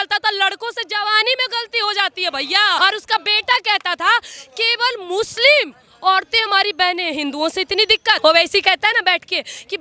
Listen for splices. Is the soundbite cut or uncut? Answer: cut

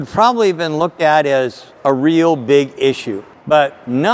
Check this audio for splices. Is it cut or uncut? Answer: uncut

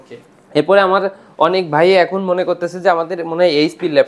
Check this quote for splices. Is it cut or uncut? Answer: uncut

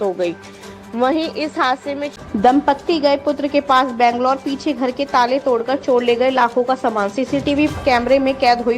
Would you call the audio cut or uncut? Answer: cut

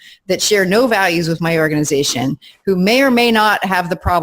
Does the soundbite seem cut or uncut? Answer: uncut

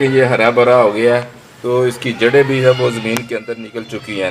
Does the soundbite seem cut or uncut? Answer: uncut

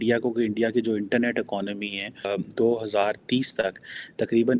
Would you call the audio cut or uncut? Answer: cut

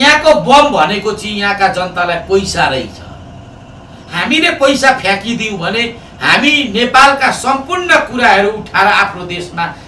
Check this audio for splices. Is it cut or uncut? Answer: uncut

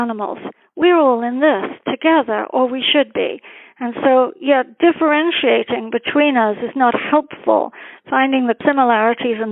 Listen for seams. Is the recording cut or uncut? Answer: cut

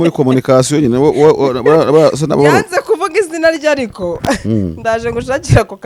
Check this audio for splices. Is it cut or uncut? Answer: uncut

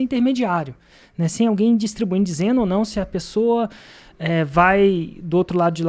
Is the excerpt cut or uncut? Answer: uncut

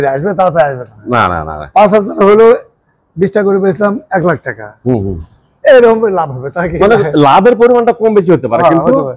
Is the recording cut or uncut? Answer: uncut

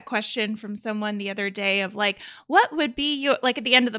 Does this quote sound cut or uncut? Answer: uncut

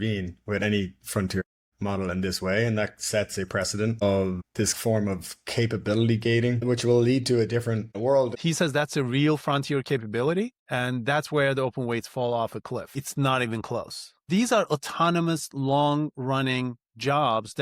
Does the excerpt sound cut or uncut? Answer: cut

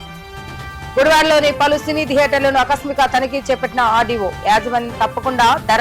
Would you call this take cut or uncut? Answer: cut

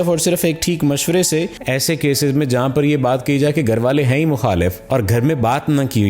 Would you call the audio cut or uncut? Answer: cut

